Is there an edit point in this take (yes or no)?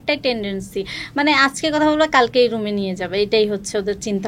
no